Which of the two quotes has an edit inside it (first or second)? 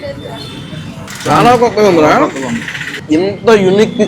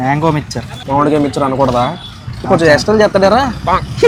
first